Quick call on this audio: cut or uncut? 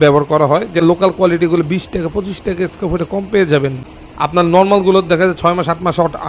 cut